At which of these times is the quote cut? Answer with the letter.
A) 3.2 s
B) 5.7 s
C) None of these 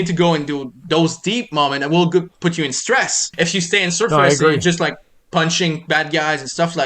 A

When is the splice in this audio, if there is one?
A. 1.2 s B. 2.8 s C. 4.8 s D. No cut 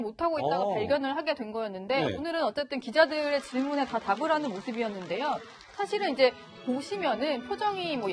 A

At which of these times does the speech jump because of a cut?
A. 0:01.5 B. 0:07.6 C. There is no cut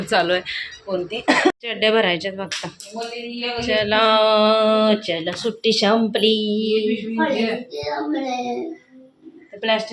A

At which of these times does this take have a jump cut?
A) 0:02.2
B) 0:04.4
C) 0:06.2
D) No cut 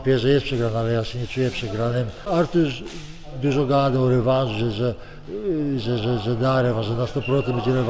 A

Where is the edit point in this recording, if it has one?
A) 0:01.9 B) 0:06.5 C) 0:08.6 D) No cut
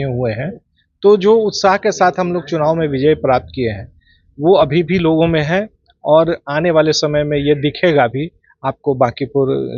D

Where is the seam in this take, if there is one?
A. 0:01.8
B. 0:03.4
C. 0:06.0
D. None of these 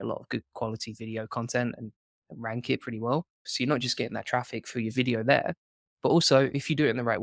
B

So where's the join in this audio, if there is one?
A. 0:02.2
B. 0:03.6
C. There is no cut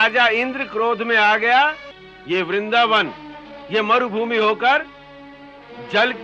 A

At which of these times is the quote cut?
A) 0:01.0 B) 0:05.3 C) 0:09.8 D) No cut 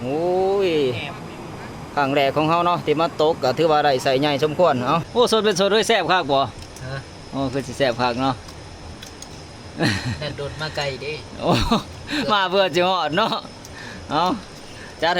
B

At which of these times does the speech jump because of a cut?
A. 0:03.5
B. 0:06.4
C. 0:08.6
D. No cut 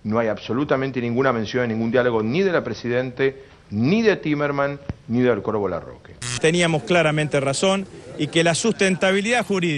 B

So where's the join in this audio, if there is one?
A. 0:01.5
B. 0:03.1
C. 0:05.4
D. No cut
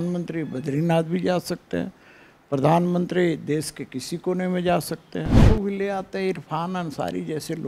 C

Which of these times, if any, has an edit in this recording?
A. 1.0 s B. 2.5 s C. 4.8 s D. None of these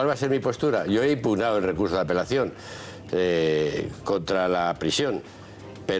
A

